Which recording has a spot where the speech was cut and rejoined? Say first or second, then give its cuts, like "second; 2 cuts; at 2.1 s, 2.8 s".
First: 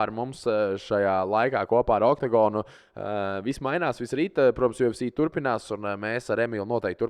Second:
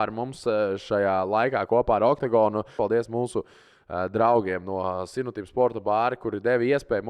second; 1 cut; at 2.7 s